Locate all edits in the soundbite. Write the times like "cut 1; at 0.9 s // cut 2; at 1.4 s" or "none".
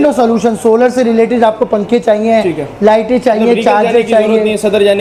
none